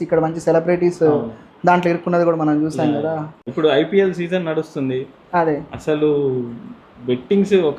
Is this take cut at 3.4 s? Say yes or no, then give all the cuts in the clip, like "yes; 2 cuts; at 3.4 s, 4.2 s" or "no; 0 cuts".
yes; 1 cut; at 3.4 s